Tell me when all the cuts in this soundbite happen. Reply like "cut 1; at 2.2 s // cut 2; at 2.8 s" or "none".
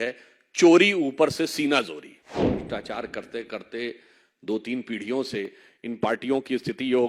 cut 1; at 2.5 s